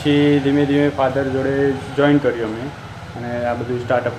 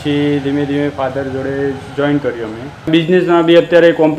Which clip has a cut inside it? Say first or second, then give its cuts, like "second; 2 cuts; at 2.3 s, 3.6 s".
second; 1 cut; at 2.9 s